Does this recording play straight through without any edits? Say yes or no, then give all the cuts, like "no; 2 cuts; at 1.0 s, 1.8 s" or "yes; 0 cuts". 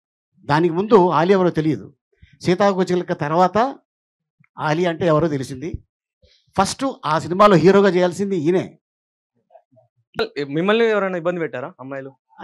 no; 1 cut; at 10.2 s